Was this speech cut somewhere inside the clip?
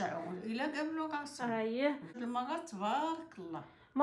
yes; 1 cut; at 2.1 s

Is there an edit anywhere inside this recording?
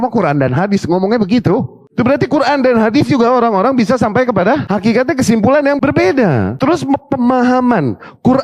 yes; 3 cuts; at 4.6 s, 5.8 s, 6.5 s

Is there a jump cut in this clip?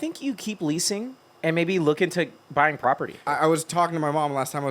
yes; 2 cuts; at 1.2 s, 3.3 s

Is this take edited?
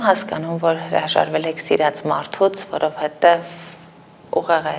no; 0 cuts

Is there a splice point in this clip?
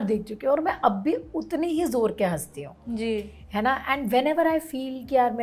no; 0 cuts

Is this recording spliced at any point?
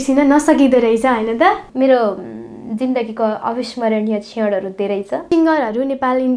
yes; 2 cuts; at 1.7 s, 5.2 s

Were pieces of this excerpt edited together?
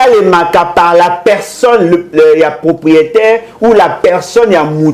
no; 0 cuts

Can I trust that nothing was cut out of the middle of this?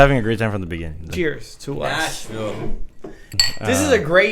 no; 2 cuts; at 1.1 s, 3.4 s

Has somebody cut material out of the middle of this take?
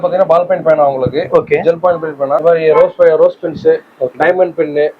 yes; 1 cut; at 2.4 s

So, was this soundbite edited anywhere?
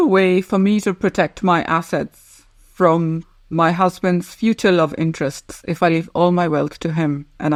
no; 0 cuts

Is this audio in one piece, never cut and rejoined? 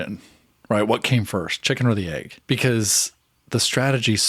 no; 1 cut; at 2.3 s

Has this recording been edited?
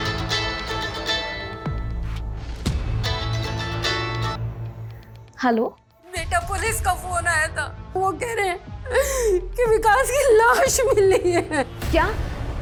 no; 0 cuts

